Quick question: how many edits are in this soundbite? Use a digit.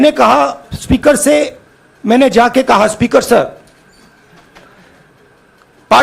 0